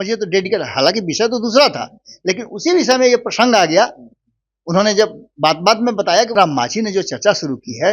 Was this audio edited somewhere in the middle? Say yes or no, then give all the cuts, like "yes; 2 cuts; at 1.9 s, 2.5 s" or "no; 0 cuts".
yes; 1 cut; at 6.3 s